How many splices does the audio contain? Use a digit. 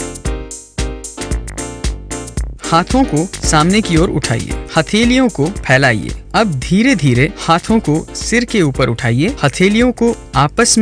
1